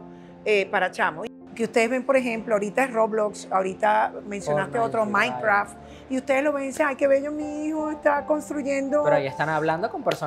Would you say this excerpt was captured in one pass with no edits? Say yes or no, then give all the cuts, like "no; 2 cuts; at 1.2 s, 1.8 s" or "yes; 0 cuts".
no; 1 cut; at 1.3 s